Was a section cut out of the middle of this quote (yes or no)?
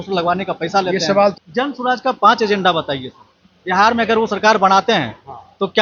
yes